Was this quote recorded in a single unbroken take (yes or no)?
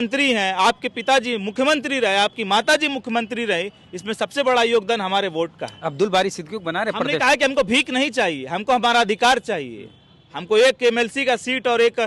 yes